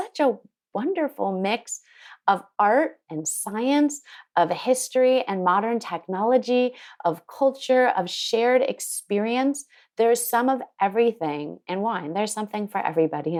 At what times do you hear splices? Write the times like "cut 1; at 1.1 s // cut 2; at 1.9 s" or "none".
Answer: none